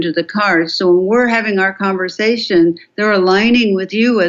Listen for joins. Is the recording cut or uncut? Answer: uncut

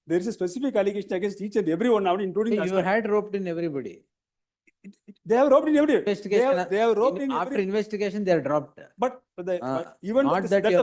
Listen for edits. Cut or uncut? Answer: uncut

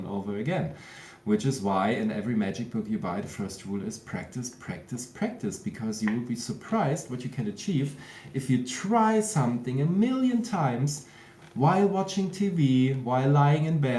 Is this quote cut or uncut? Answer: uncut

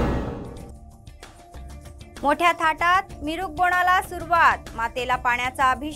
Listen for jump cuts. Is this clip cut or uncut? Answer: cut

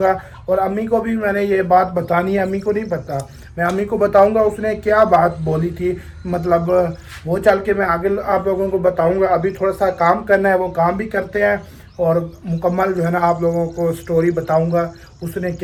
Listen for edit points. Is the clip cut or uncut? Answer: uncut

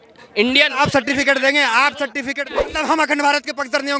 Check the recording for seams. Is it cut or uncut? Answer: cut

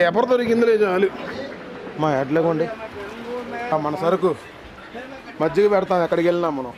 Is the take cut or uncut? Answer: cut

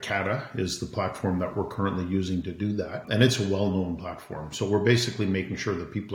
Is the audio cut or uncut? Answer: cut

